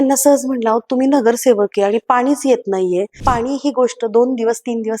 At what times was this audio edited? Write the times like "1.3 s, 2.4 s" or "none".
3.1 s

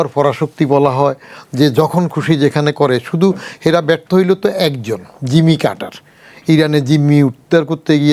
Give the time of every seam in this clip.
none

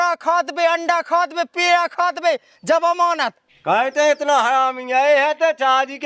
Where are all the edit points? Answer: 3.4 s

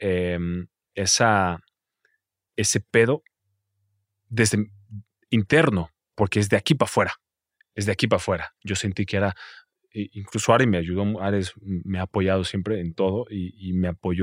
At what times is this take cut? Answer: none

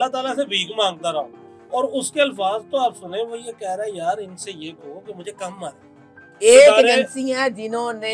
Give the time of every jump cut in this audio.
none

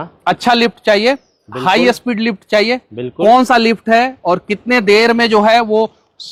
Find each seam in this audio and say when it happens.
none

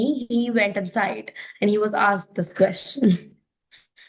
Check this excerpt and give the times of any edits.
none

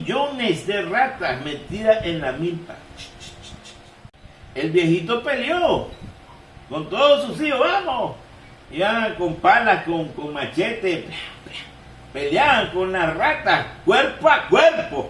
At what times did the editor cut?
4.1 s

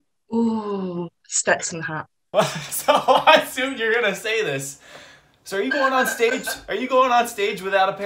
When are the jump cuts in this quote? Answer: none

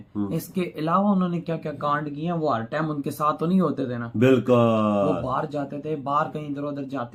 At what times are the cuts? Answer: none

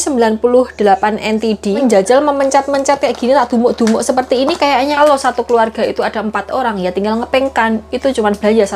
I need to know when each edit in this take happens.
1.8 s, 4.9 s

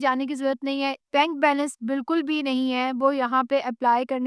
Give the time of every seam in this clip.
1.0 s

